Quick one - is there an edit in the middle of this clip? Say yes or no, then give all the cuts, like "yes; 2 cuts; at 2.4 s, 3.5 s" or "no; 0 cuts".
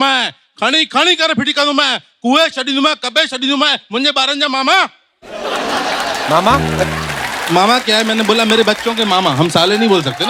no; 0 cuts